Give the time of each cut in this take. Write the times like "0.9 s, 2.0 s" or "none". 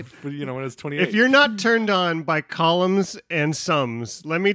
0.9 s